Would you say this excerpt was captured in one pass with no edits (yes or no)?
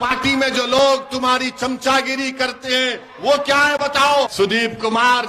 no